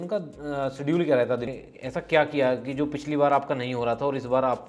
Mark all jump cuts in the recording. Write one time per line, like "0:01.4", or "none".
0:01.5